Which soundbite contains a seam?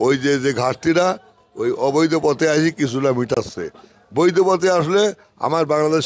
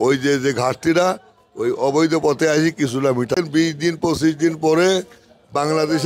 second; 1 cut; at 3.3 s

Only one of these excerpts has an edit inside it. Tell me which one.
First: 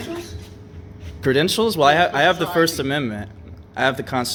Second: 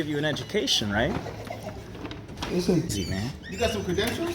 second; 1 cut; at 3.0 s

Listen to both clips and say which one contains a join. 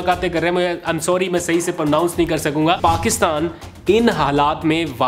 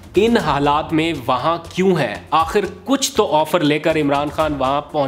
first; 1 cut; at 2.8 s

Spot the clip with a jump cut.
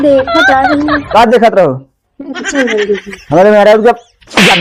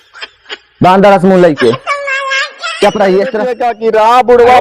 second; 1 cut; at 3.7 s

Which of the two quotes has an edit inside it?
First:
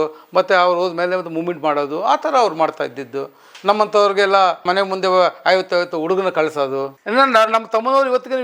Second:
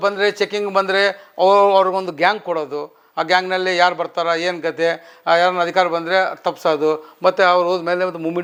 first; 2 cuts; at 4.6 s, 7.0 s

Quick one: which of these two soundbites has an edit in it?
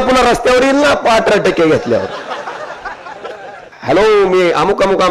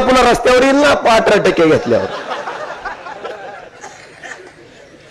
first; 1 cut; at 3.7 s

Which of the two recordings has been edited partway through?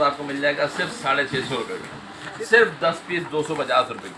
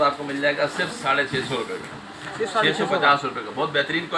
first; 1 cut; at 2.3 s

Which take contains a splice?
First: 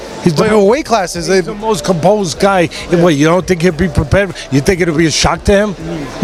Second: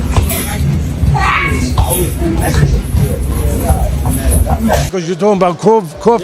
second; 1 cut; at 4.7 s

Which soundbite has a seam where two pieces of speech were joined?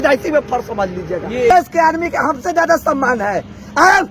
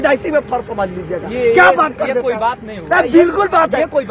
first; 1 cut; at 1.5 s

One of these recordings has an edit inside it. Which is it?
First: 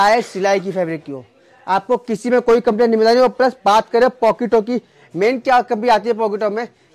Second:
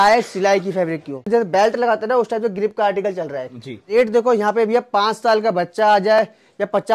second; 2 cuts; at 1.3 s, 3.9 s

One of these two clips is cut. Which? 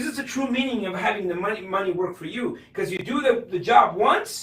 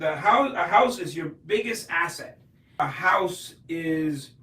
second; 1 cut; at 2.7 s

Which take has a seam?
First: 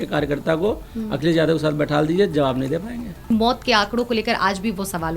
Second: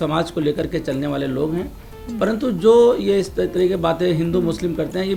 first; 1 cut; at 3.3 s

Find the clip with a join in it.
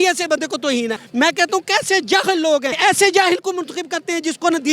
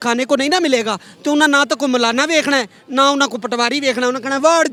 first; 2 cuts; at 1.0 s, 2.7 s

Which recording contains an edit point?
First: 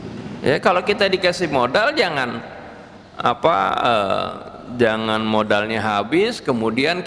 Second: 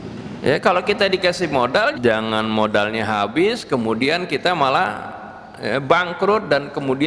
second; 1 cut; at 1.9 s

